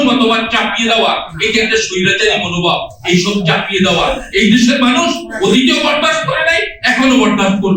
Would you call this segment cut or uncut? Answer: uncut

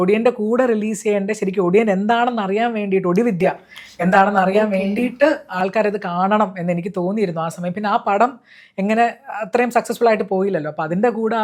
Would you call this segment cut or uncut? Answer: uncut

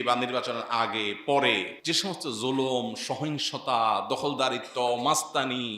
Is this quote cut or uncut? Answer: cut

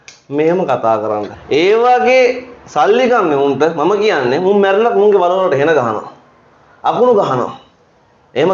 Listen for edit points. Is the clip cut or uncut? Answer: cut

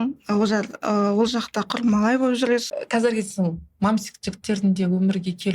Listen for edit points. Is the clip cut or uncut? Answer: cut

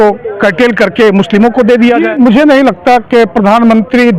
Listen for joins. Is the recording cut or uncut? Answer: cut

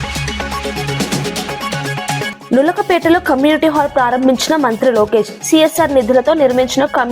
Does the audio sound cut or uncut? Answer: cut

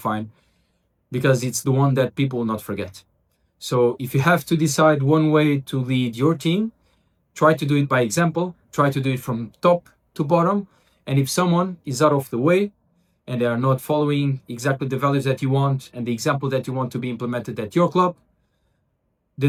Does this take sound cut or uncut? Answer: uncut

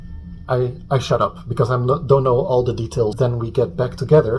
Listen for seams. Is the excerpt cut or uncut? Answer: cut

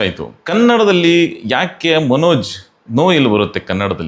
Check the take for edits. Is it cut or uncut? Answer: uncut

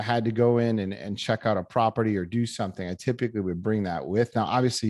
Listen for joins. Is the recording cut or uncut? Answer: uncut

